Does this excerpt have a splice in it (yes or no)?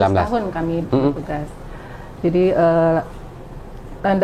no